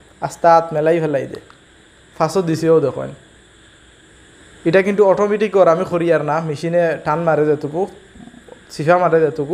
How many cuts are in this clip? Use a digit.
0